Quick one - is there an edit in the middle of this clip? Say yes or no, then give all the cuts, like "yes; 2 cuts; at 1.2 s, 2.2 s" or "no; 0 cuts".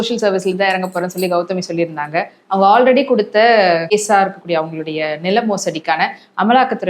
yes; 1 cut; at 3.9 s